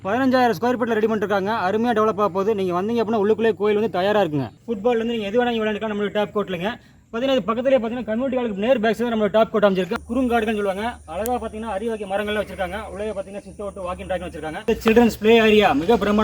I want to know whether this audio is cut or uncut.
cut